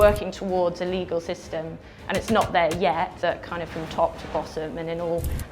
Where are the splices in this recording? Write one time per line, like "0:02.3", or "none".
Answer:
0:03.1